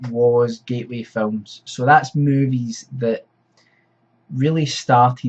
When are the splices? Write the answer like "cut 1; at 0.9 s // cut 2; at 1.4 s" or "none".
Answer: cut 1; at 2.4 s